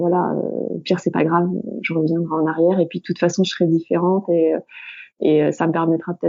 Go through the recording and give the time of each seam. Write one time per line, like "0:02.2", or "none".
none